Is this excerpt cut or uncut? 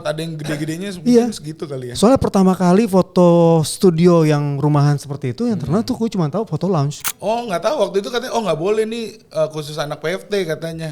cut